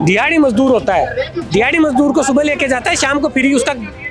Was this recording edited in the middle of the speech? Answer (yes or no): no